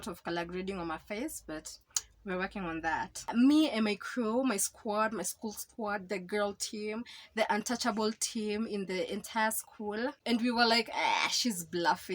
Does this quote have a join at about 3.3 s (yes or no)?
yes